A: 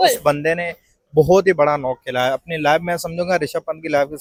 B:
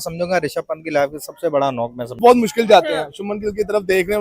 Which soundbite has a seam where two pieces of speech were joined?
B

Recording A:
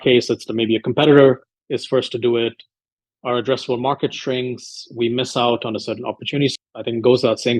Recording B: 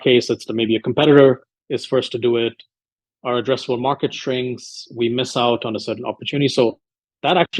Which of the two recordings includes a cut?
A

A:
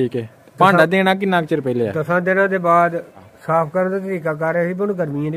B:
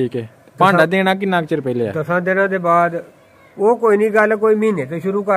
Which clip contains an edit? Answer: A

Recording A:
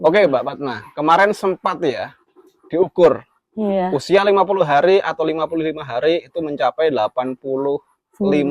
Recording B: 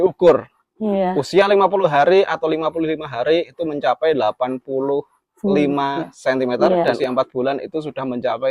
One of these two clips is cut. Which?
B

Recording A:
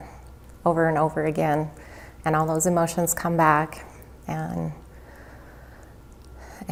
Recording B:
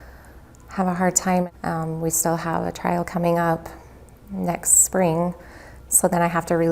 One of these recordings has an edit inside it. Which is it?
B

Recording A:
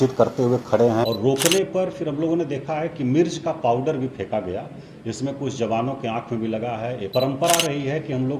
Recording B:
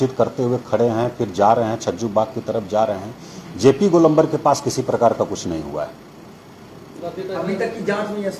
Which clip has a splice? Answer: A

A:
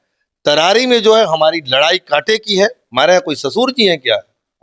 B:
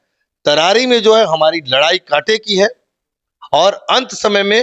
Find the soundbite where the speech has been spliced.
A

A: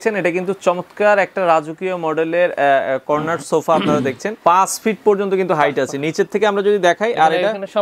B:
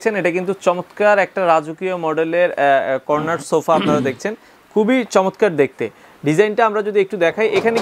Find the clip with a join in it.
A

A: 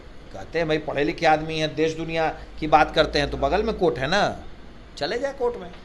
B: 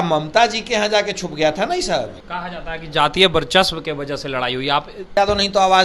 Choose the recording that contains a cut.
B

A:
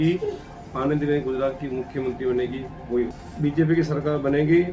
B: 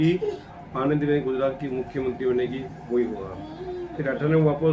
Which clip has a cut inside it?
A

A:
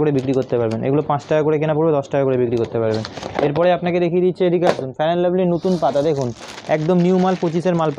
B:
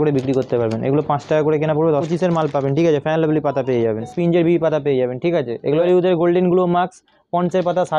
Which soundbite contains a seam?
B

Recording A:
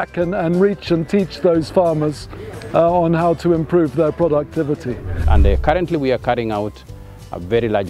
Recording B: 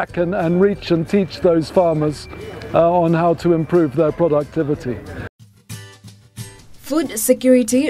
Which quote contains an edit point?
A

